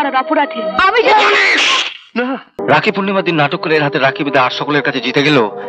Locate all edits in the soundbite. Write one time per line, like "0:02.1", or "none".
0:02.6